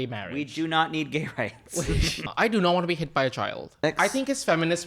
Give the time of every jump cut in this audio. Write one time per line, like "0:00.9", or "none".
0:02.2
0:03.8